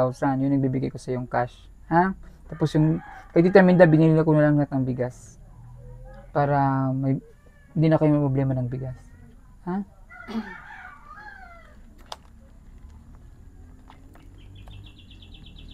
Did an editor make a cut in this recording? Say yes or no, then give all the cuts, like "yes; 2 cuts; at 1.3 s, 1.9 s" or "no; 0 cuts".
no; 0 cuts